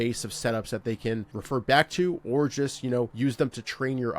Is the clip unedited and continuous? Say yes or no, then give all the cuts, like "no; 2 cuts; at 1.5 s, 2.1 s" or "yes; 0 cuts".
no; 2 cuts; at 1.4 s, 3.1 s